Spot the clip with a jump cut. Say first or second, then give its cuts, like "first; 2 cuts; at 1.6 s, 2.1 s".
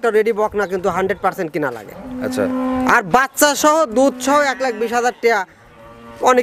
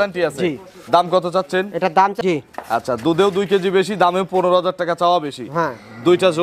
second; 1 cut; at 2.2 s